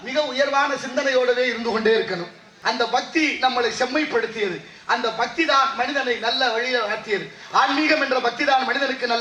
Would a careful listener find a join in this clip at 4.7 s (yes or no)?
no